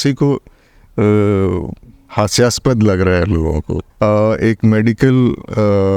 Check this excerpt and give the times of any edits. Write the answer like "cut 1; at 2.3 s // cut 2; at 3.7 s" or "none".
cut 1; at 3.8 s

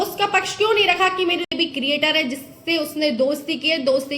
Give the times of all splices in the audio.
cut 1; at 1.5 s

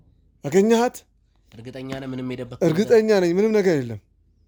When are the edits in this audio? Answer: none

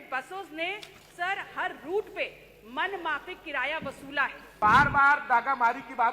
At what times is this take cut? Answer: cut 1; at 4.6 s

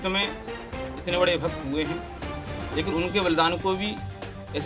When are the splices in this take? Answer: none

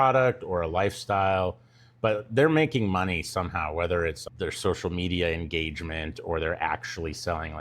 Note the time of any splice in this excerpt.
cut 1; at 4.2 s

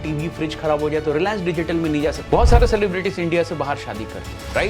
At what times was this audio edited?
cut 1; at 2.2 s

